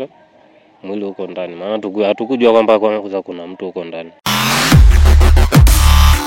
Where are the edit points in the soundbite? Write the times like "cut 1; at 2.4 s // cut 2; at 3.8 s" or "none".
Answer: cut 1; at 4.1 s